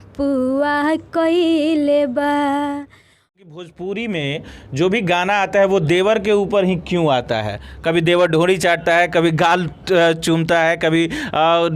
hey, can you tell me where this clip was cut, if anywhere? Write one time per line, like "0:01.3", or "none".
0:03.2